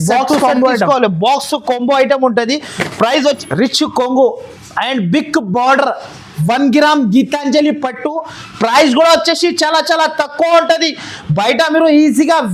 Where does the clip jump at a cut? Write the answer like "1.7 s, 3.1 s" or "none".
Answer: 3.4 s